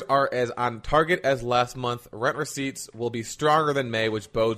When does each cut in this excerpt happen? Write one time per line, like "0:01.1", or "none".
none